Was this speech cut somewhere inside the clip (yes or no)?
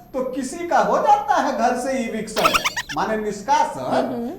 no